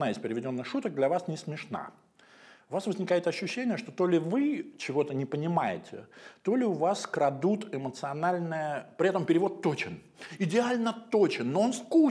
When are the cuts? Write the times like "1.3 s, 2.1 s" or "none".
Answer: none